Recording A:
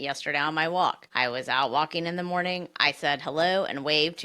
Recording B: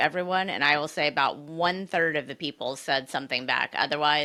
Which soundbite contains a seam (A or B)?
A